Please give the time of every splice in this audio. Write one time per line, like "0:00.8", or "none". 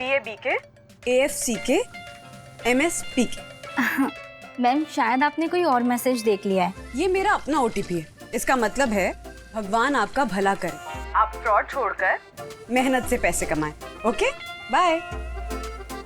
0:06.8